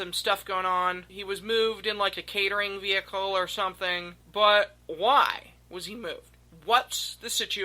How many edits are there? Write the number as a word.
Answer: two